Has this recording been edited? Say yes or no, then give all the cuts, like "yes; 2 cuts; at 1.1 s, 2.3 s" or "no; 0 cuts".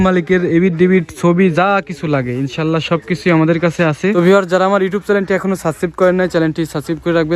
yes; 1 cut; at 4.1 s